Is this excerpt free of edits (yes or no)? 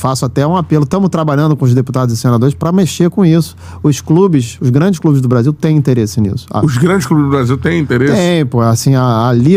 yes